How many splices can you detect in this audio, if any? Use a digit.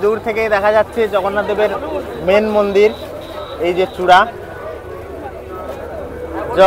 0